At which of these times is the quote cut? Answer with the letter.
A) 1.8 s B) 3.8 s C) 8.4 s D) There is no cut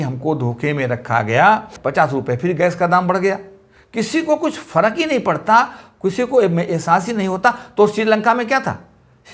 A